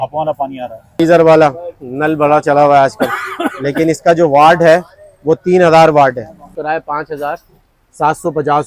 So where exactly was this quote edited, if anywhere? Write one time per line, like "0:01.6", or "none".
0:01.0
0:06.5